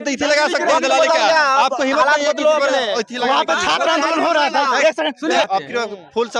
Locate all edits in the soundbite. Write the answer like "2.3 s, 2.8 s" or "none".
5.5 s